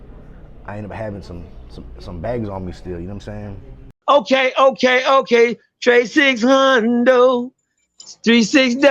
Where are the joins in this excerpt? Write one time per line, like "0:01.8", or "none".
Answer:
0:03.9